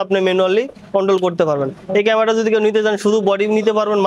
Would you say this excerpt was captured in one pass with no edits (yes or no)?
yes